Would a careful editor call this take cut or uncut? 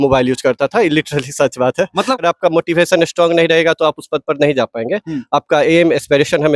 cut